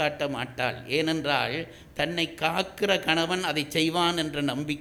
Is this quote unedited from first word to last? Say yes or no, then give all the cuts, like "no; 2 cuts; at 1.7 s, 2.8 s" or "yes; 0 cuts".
yes; 0 cuts